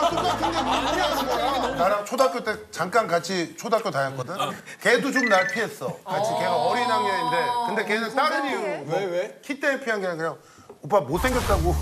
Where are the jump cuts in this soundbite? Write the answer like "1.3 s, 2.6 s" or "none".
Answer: 1.7 s